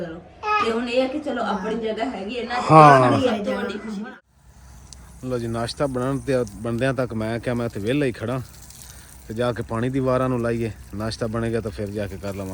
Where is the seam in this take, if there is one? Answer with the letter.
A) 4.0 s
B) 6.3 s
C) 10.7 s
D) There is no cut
A